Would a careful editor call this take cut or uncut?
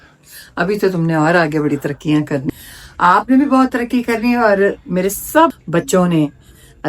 cut